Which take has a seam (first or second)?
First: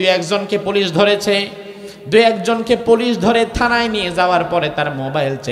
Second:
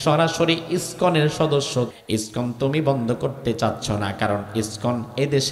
second